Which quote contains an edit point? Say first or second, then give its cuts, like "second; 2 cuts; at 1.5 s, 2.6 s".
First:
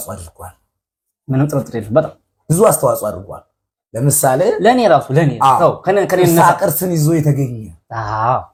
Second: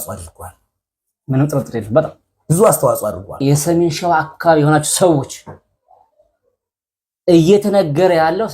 second; 1 cut; at 3.4 s